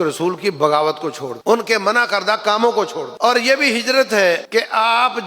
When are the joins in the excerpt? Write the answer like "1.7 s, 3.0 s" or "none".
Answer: 1.3 s, 3.0 s, 4.4 s